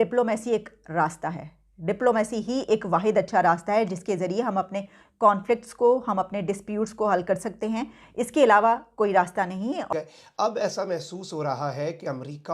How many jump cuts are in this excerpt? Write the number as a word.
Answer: one